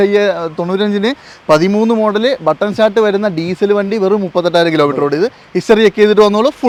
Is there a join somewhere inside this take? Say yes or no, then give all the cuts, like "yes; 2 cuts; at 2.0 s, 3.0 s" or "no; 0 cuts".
no; 0 cuts